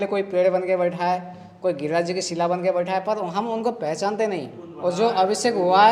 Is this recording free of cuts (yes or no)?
no